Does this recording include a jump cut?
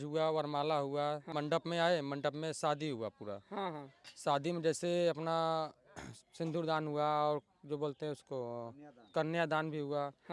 yes; 1 cut; at 1.3 s

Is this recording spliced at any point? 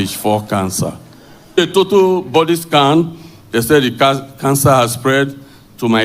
yes; 1 cut; at 1.6 s

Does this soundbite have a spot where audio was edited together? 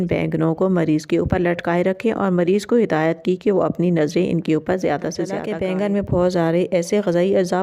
yes; 1 cut; at 5.4 s

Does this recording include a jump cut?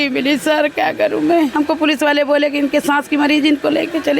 yes; 1 cut; at 1.5 s

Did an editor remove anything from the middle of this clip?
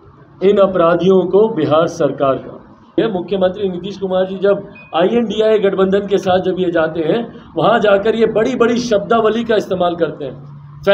yes; 1 cut; at 2.9 s

